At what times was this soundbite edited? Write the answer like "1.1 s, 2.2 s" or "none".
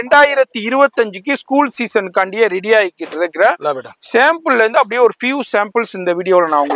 none